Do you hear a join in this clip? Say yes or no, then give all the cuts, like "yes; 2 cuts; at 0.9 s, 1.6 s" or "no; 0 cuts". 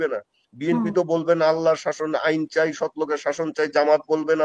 no; 0 cuts